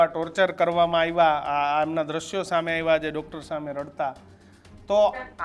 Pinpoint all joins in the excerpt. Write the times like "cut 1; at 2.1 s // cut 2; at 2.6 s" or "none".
none

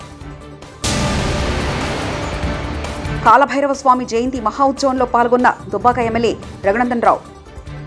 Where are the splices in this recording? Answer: cut 1; at 3.2 s

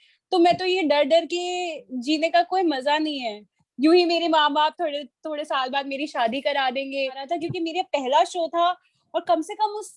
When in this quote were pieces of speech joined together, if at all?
cut 1; at 7.2 s

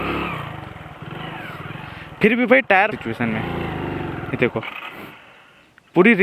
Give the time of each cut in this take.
cut 1; at 3.0 s

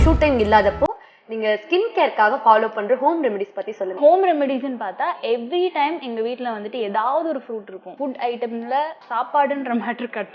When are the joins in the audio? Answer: cut 1; at 3.9 s // cut 2; at 7.9 s // cut 3; at 9.0 s

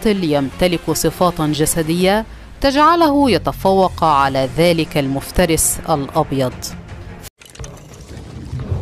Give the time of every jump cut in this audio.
cut 1; at 7.2 s

